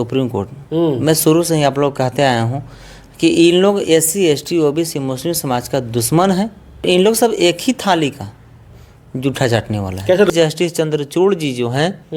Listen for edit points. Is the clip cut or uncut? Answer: cut